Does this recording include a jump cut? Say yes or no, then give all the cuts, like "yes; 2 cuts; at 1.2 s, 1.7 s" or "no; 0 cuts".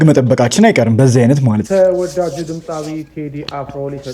yes; 1 cut; at 1.6 s